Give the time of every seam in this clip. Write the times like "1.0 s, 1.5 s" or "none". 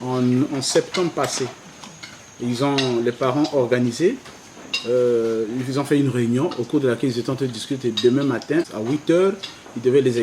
8.7 s

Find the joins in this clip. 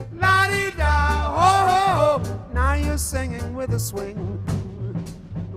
4.3 s

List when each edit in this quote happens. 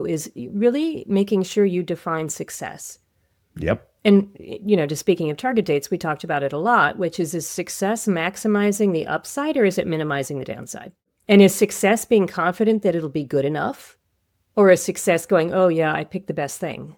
none

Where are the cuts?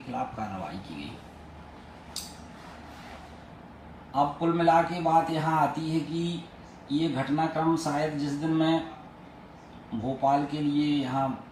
none

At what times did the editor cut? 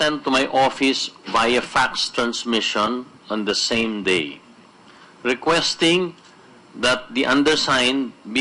5.2 s

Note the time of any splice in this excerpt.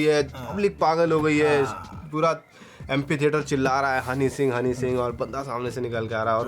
none

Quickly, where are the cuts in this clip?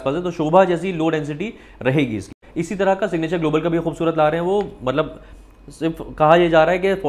2.4 s

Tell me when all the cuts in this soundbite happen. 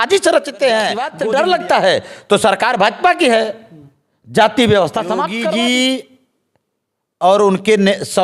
1.1 s, 5.3 s

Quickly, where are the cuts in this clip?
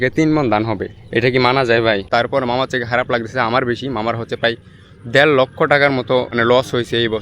2.0 s, 6.3 s

